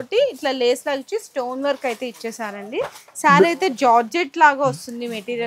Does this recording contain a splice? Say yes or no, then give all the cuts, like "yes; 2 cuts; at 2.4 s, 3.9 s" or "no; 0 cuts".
no; 0 cuts